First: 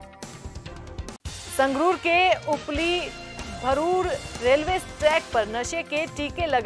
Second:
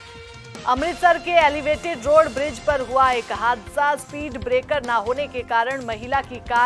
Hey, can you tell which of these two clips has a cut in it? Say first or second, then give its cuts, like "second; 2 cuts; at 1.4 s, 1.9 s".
first; 1 cut; at 1.1 s